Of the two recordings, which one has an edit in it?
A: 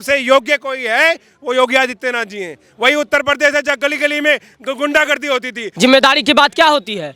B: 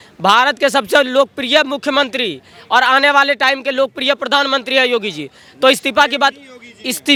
A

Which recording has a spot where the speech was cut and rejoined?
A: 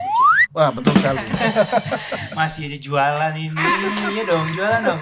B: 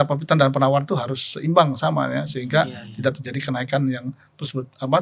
A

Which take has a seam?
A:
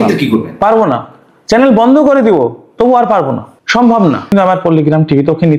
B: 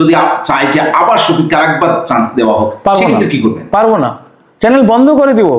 A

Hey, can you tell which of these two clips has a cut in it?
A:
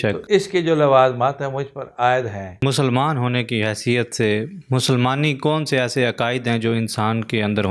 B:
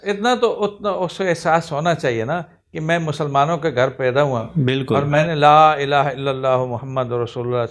A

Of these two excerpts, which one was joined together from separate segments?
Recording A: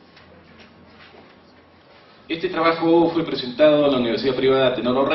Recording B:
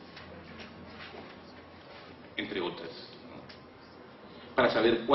A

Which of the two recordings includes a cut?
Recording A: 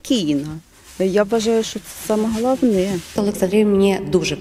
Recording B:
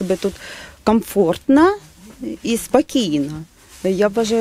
A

